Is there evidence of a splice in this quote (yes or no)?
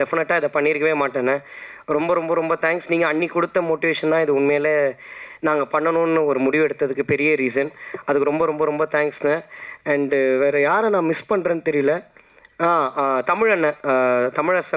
no